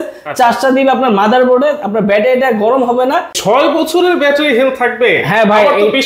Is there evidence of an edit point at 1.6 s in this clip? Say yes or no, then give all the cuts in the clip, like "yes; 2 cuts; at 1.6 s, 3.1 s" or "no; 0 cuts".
no; 1 cut; at 3.3 s